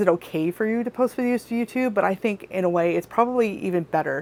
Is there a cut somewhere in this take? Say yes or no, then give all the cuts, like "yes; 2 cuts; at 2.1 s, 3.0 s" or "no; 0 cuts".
no; 0 cuts